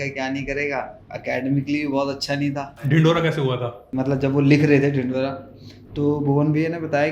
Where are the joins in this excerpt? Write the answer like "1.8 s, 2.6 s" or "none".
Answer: 1.0 s, 2.7 s, 3.9 s